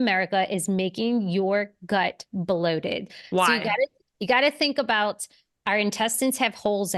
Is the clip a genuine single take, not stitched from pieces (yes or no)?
yes